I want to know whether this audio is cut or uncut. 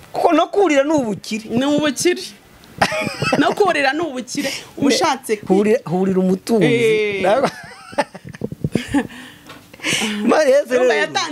uncut